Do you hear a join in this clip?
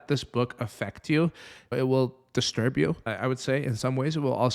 yes; 2 cuts; at 1.7 s, 3.1 s

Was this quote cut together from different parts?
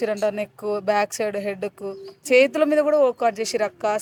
no; 0 cuts

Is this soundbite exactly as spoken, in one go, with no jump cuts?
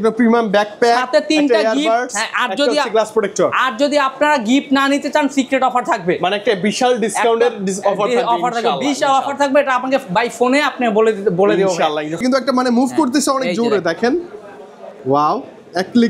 yes; 0 cuts

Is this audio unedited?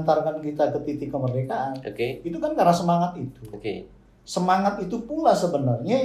yes; 0 cuts

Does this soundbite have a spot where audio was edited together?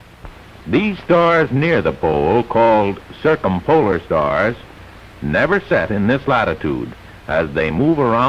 yes; 1 cut; at 1.0 s

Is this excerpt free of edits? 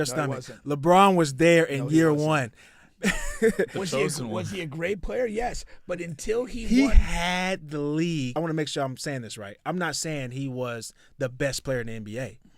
no; 1 cut; at 8.3 s

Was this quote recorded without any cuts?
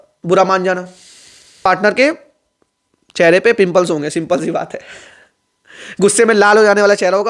no; 1 cut; at 1.6 s

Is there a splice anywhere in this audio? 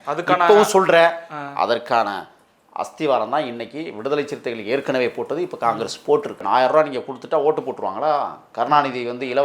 yes; 1 cut; at 6.4 s

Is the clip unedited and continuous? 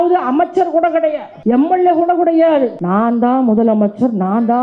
no; 2 cuts; at 1.3 s, 2.8 s

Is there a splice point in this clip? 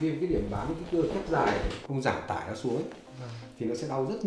yes; 1 cut; at 1.8 s

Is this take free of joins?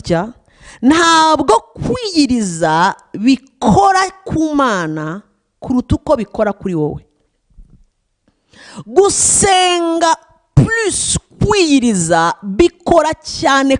yes; 0 cuts

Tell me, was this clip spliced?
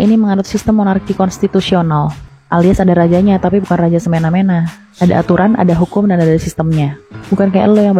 no; 0 cuts

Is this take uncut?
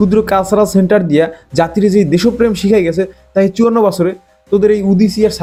yes; 0 cuts

